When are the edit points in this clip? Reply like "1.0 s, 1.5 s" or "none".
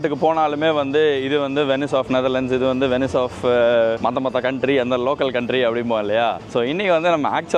4.0 s, 6.4 s